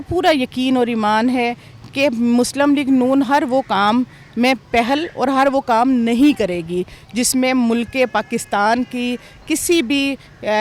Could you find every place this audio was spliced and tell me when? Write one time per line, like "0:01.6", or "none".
none